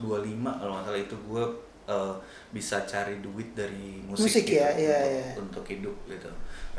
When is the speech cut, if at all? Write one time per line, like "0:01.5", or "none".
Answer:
none

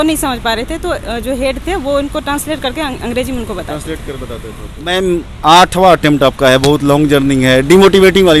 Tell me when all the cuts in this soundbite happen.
0:04.7

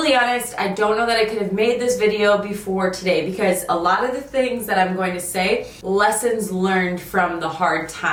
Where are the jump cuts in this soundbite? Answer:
none

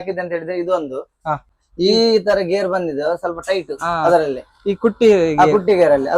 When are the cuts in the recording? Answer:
0:01.5

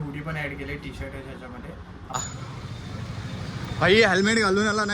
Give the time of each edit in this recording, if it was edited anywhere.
0:02.1

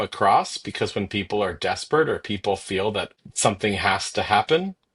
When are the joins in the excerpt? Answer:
0:03.2

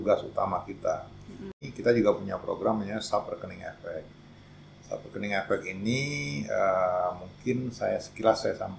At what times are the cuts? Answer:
0:01.6

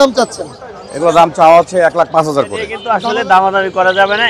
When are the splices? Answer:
0:02.8

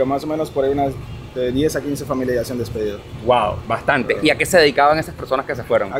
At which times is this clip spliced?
none

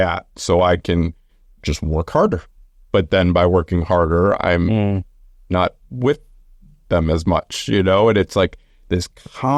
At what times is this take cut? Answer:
none

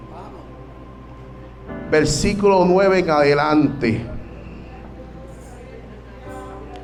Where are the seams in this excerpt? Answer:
none

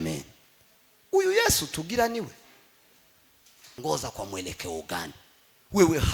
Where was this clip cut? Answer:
0:03.5

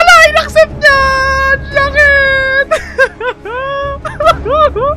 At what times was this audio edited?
0:04.0

